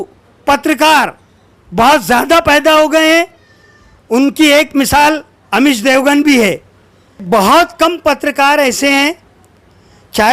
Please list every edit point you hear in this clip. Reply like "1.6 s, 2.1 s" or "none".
7.2 s